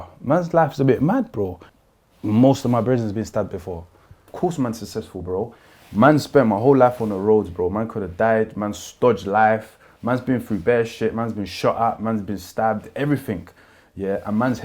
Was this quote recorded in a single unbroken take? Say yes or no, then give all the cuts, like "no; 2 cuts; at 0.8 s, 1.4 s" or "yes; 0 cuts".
no; 2 cuts; at 1.6 s, 4.2 s